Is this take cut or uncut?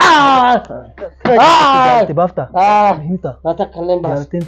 cut